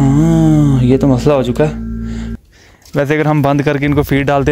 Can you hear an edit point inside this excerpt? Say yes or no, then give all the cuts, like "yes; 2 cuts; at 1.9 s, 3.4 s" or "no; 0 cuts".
yes; 1 cut; at 2.3 s